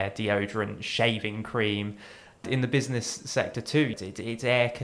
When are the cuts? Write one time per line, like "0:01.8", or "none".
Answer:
0:02.4
0:04.0